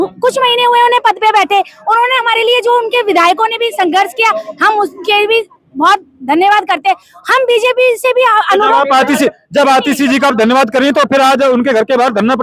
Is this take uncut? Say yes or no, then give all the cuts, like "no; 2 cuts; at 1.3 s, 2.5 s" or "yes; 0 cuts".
yes; 0 cuts